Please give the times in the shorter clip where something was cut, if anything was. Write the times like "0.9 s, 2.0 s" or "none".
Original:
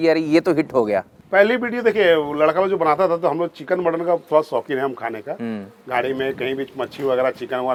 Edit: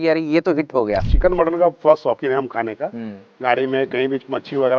1.1 s